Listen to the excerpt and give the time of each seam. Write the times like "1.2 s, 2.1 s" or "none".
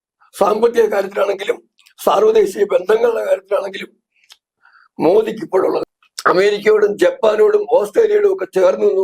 5.8 s

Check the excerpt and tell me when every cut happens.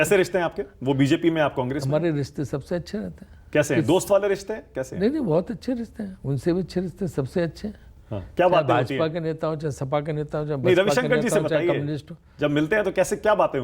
none

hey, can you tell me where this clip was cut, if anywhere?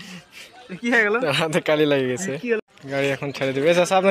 2.6 s

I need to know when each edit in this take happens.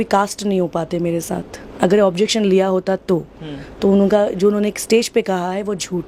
none

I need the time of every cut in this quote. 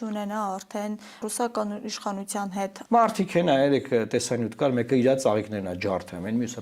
1.3 s, 2.8 s

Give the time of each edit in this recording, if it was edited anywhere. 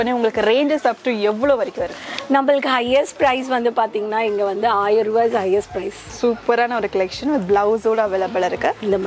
6.0 s

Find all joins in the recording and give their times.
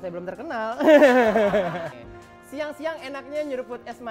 1.9 s

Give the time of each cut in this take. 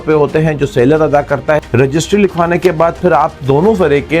1.6 s

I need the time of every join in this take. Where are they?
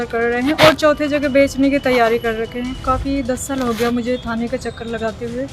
2.9 s

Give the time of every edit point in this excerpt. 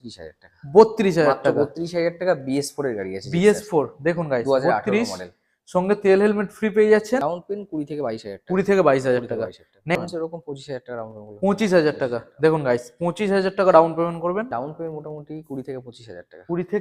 7.2 s, 10.0 s, 14.5 s

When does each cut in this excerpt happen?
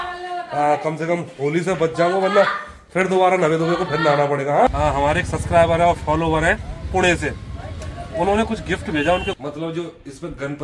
4.7 s, 9.3 s

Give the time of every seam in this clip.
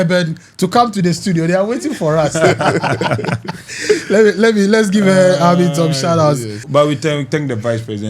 6.5 s

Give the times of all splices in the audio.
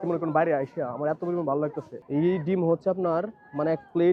1.9 s

